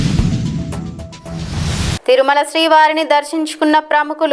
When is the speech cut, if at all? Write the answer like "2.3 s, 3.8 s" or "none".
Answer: none